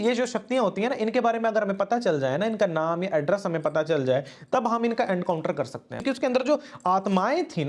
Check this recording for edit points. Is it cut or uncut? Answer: cut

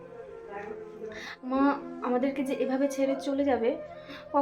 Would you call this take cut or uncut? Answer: cut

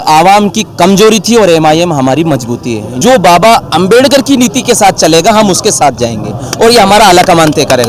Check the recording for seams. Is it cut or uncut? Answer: cut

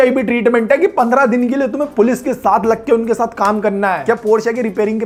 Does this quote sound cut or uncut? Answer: uncut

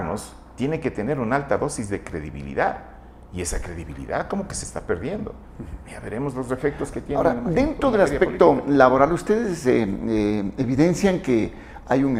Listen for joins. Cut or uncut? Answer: uncut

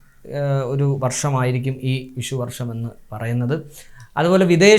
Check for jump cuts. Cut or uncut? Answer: uncut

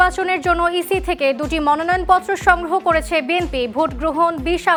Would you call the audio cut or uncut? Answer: uncut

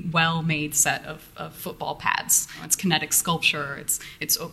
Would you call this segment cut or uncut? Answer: cut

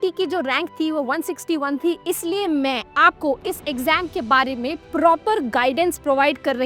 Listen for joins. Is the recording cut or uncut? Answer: uncut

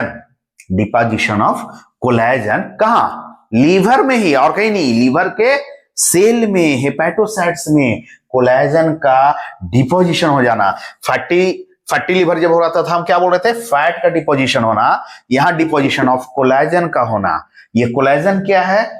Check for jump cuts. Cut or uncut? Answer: uncut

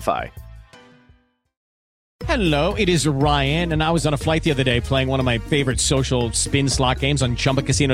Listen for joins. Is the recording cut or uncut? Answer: cut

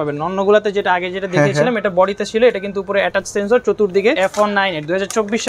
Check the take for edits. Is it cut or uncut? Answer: cut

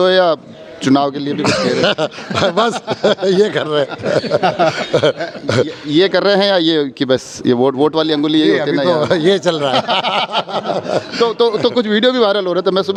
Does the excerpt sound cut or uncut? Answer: uncut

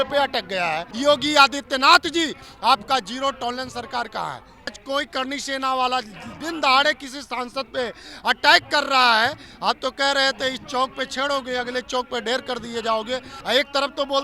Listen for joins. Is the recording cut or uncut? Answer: cut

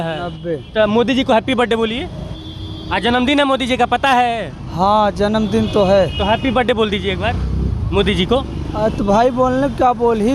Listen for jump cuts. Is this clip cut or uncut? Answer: uncut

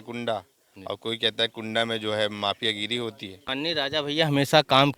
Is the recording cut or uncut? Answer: cut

